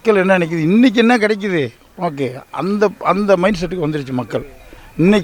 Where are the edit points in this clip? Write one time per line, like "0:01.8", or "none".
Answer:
none